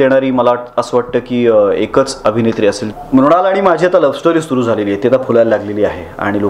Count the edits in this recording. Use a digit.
1